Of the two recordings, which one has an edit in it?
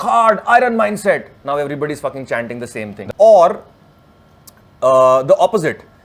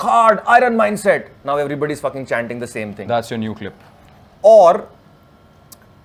first; 1 cut; at 3.0 s

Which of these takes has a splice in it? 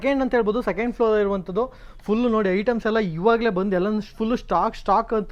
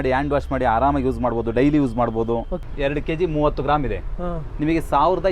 second; 1 cut; at 2.6 s

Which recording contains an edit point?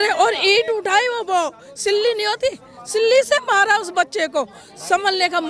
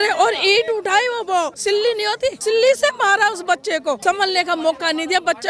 second; 2 cuts; at 1.9 s, 4.0 s

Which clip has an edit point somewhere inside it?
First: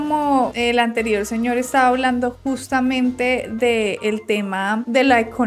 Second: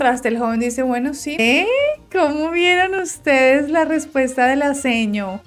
second; 1 cut; at 1.4 s

